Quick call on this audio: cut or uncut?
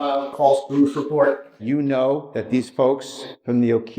cut